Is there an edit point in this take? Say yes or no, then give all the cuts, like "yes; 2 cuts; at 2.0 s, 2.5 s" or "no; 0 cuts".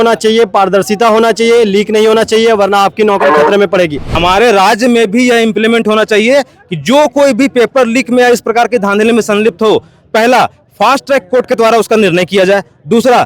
yes; 1 cut; at 4.1 s